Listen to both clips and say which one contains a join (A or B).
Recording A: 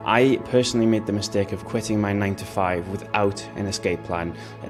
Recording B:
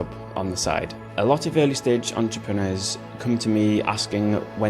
B